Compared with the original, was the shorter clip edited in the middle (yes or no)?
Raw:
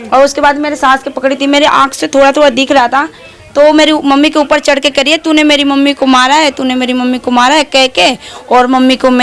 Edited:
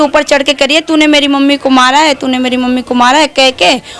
no